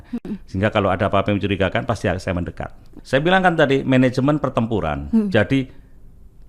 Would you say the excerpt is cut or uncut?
cut